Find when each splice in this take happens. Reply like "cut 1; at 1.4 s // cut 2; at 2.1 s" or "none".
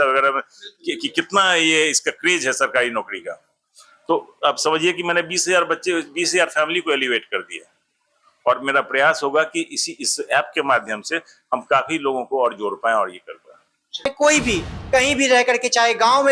cut 1; at 14.1 s

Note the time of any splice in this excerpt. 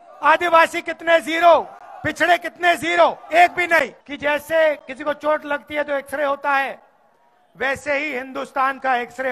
cut 1; at 4.0 s

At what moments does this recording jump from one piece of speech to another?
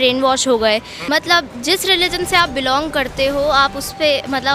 cut 1; at 0.9 s

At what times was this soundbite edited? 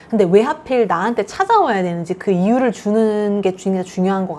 none

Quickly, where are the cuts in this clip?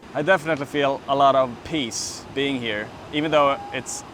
none

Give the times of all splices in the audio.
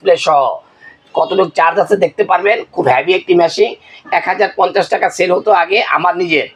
none

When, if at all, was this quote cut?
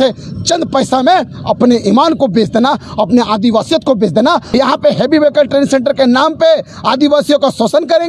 cut 1; at 4.5 s

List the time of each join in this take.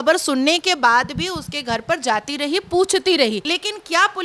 none

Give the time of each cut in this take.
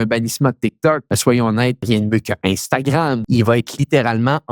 cut 1; at 1.1 s // cut 2; at 1.8 s // cut 3; at 3.2 s

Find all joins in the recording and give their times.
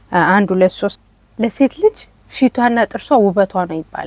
cut 1; at 1.0 s

